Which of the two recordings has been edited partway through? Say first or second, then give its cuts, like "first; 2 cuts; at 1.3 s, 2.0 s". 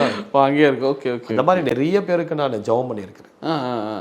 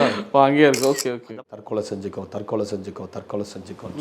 second; 1 cut; at 1.2 s